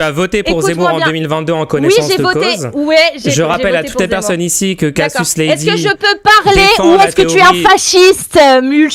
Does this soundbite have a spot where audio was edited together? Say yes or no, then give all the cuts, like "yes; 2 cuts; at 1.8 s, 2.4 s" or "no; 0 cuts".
no; 0 cuts